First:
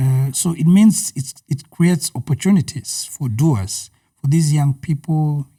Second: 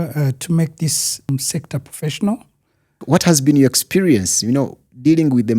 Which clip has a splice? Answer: second; 2 cuts; at 1.3 s, 3.0 s

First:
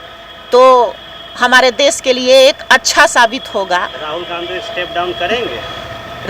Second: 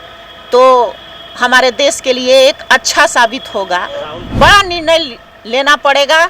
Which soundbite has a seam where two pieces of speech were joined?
second; 1 cut; at 4.2 s

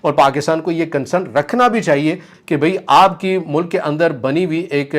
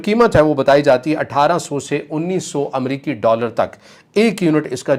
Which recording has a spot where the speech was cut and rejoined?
first; 1 cut; at 2.3 s

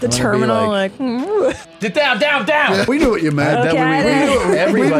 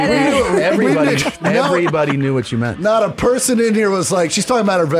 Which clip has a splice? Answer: first; 2 cuts; at 1.6 s, 2.9 s

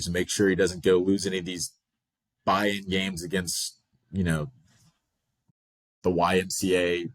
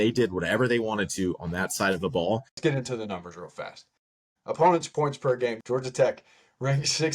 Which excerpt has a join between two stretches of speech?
second; 2 cuts; at 2.6 s, 5.6 s

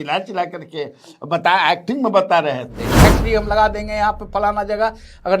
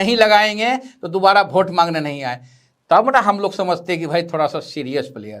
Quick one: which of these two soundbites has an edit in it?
first; 1 cut; at 2.9 s

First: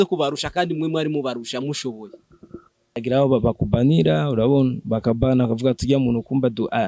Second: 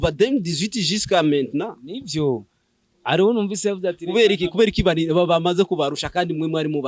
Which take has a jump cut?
first; 1 cut; at 3.0 s

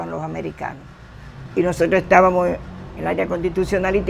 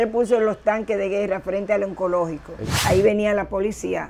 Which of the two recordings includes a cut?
second; 1 cut; at 2.7 s

